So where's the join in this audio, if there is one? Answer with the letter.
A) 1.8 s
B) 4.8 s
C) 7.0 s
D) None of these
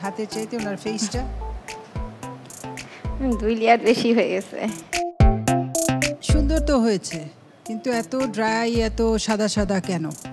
B